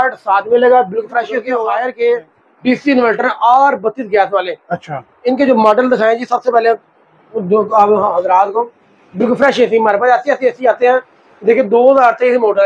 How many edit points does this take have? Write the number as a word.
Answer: one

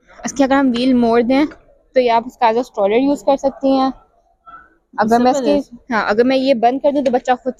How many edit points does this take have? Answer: zero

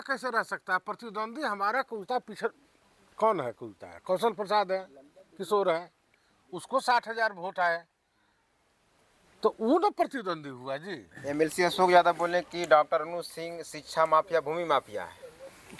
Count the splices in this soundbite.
one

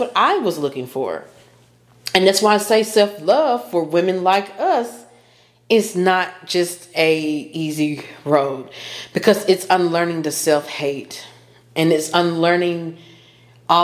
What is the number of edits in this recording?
zero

